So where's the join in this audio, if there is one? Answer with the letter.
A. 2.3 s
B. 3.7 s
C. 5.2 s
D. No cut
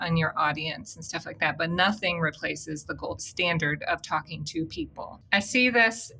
C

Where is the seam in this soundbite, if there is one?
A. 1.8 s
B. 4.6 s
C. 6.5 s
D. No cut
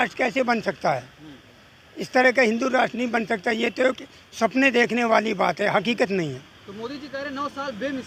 D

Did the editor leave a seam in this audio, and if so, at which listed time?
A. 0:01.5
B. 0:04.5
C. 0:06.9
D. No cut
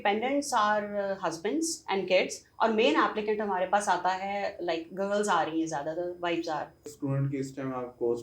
C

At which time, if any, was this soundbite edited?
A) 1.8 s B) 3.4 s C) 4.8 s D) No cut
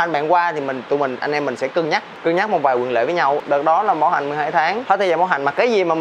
C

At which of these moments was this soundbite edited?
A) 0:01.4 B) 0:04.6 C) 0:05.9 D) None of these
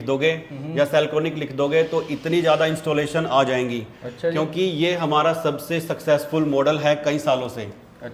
D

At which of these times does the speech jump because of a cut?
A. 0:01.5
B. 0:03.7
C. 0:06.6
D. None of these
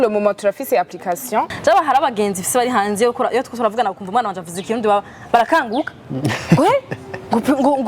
A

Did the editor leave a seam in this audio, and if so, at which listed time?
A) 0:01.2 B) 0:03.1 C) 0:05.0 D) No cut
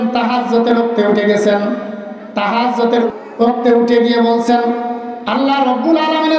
B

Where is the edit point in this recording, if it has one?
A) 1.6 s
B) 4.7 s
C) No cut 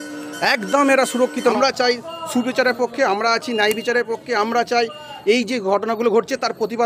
A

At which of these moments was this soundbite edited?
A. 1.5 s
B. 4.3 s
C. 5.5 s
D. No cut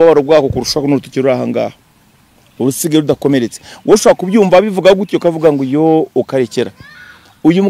D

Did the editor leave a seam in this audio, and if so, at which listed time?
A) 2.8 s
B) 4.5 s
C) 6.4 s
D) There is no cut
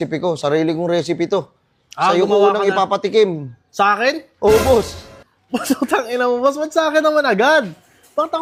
D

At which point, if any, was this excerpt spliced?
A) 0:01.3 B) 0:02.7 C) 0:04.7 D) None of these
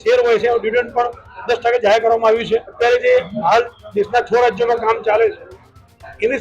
B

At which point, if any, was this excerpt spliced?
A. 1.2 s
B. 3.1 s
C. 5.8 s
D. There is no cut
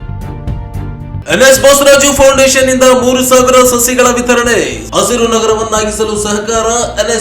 A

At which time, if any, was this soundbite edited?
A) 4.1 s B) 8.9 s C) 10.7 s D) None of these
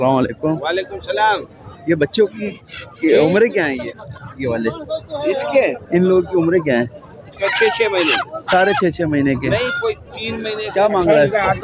C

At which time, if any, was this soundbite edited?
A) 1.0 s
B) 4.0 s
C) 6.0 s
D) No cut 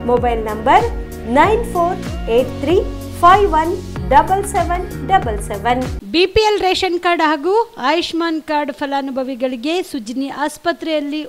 C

